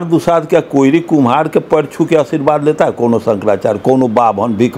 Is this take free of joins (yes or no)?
yes